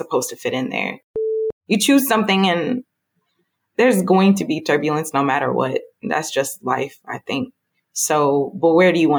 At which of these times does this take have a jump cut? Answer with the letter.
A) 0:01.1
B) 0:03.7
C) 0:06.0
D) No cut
A